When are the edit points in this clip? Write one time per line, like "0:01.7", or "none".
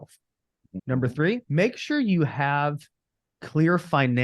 0:00.8
0:01.5